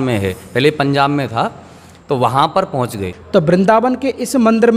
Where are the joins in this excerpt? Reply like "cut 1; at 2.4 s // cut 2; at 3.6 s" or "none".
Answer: cut 1; at 3.1 s